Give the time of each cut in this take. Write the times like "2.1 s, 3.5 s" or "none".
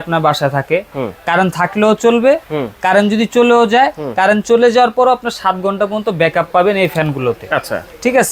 none